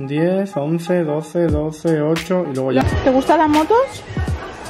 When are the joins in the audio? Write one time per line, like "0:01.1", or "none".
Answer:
0:02.8